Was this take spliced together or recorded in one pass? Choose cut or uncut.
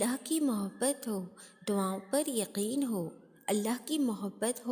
uncut